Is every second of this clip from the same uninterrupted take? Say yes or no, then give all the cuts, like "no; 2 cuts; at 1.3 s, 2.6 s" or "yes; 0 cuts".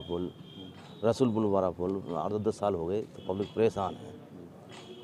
yes; 0 cuts